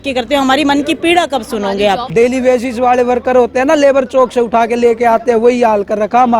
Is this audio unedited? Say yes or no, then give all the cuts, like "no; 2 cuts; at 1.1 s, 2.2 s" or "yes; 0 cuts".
no; 1 cut; at 2.0 s